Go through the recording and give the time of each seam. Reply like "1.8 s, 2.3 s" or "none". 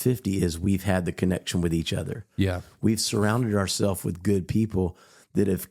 none